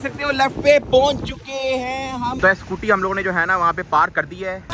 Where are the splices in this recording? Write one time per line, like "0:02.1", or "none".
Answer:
none